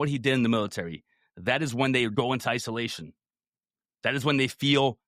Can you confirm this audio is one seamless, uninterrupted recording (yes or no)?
no